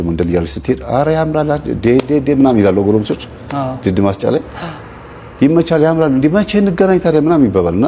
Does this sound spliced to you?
no; 0 cuts

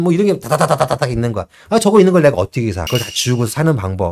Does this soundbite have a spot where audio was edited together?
yes; 1 cut; at 2.8 s

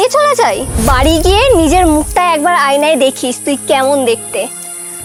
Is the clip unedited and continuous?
yes; 0 cuts

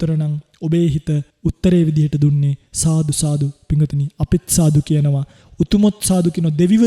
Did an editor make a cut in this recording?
yes; 1 cut; at 1.3 s

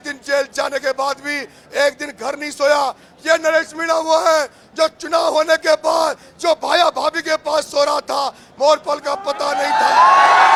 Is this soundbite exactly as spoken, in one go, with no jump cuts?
yes; 0 cuts

